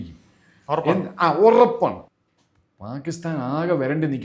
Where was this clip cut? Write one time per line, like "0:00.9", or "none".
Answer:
0:02.0